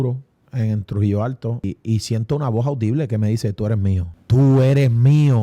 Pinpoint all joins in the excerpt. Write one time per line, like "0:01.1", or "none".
0:01.6
0:04.1